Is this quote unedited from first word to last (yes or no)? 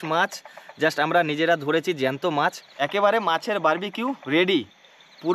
no